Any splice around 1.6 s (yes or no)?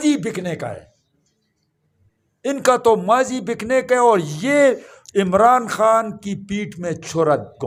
no